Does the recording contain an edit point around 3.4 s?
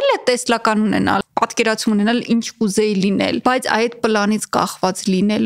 yes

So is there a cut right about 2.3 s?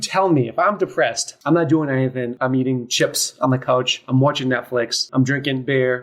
yes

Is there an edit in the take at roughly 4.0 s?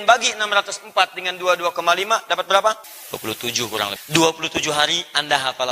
yes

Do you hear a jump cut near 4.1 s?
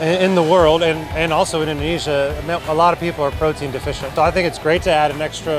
yes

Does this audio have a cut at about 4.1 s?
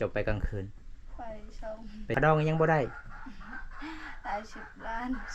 no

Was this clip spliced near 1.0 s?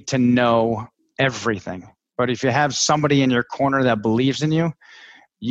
yes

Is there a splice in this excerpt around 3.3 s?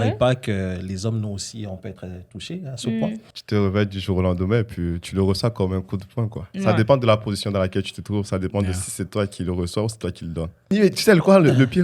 yes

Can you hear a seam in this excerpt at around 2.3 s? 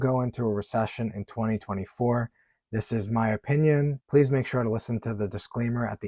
no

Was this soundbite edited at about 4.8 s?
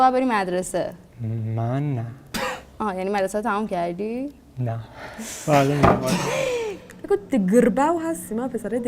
no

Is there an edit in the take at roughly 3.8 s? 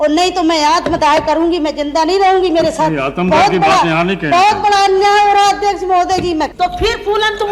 no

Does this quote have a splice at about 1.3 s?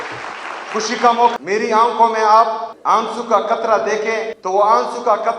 yes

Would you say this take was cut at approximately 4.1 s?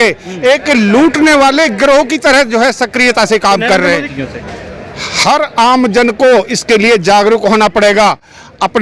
yes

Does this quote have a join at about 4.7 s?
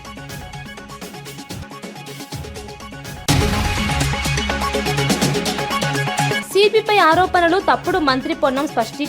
no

